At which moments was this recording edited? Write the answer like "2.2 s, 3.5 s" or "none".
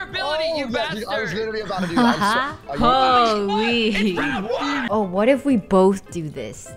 4.8 s